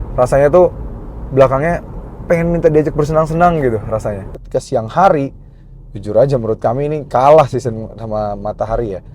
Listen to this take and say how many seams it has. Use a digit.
1